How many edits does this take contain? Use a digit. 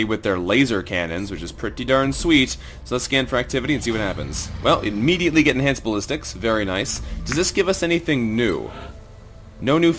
1